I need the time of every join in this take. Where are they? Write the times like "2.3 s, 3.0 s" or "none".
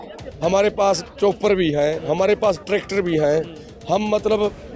none